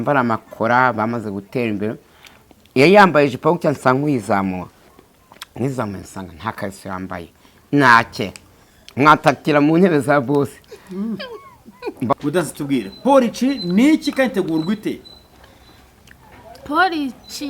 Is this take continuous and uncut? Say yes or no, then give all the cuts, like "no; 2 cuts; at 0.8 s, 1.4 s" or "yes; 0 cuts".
no; 1 cut; at 12.1 s